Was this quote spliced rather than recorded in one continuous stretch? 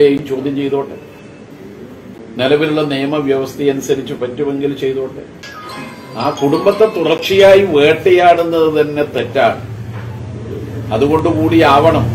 yes; 1 cut; at 5.3 s

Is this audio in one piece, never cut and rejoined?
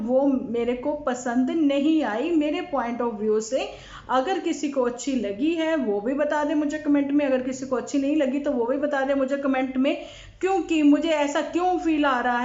yes; 0 cuts

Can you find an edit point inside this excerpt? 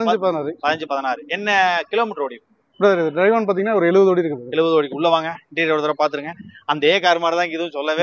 no; 0 cuts

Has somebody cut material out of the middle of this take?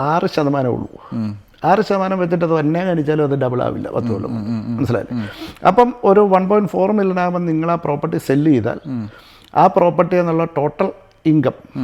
no; 0 cuts

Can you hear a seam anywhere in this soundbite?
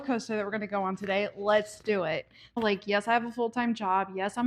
yes; 1 cut; at 2.6 s

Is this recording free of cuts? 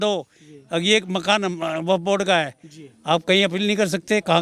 yes; 0 cuts

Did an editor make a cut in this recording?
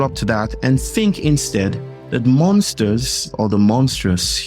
yes; 1 cut; at 3.3 s

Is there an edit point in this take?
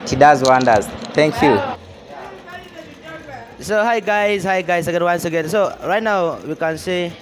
no; 0 cuts

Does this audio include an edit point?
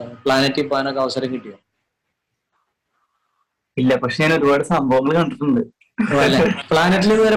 no; 0 cuts

